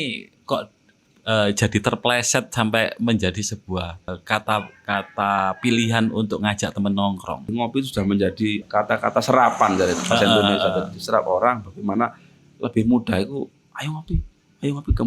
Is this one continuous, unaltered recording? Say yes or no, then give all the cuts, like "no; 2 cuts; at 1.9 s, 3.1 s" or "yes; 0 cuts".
no; 3 cuts; at 4.1 s, 7.5 s, 8.6 s